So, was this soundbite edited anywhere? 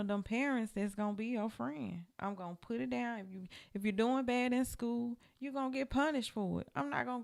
no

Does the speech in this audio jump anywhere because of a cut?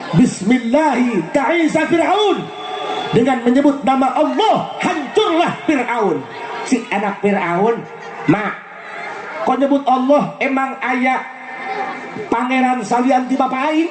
no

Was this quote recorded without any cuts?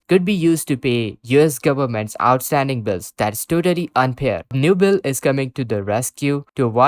no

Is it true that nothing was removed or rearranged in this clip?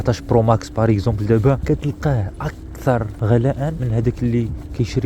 no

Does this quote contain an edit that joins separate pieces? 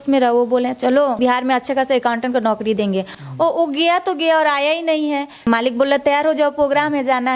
yes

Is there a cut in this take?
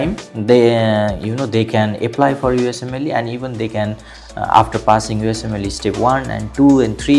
no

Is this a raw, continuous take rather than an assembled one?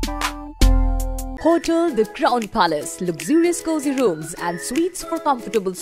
no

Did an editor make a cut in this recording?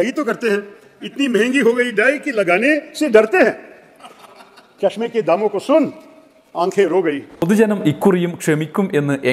yes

